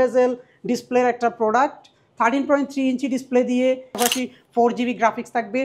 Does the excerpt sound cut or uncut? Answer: cut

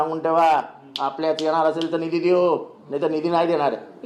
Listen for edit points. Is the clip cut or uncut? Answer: uncut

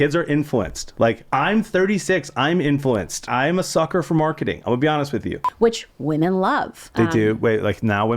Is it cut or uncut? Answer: cut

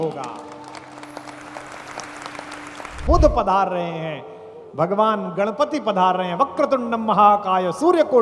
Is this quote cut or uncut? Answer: cut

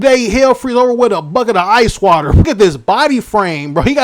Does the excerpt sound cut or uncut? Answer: cut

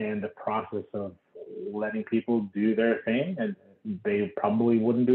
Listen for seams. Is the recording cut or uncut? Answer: uncut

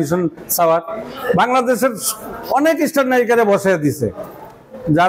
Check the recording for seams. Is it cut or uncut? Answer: cut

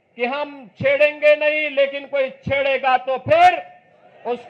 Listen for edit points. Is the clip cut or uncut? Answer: uncut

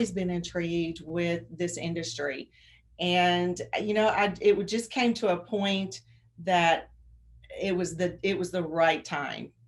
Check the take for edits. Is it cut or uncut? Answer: uncut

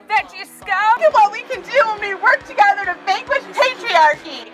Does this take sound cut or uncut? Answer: cut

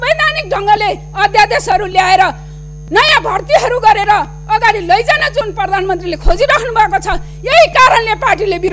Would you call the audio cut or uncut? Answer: uncut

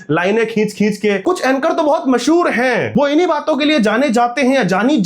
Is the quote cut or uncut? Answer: cut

